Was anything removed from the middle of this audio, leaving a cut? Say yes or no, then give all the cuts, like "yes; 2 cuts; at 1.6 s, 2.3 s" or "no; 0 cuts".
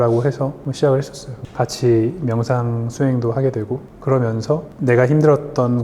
yes; 2 cuts; at 1.5 s, 4.7 s